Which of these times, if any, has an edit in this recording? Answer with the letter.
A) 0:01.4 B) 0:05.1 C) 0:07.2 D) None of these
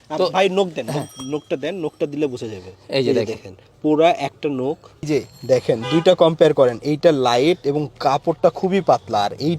B